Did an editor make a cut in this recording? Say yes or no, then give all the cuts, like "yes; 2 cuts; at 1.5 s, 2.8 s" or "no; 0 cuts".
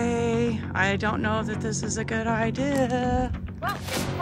no; 0 cuts